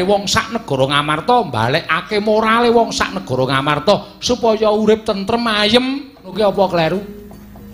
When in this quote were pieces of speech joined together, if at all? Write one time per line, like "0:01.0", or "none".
0:06.3